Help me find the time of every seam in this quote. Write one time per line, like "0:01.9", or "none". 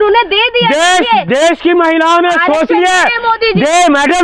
none